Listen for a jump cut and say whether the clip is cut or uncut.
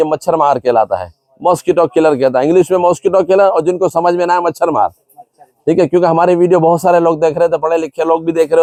uncut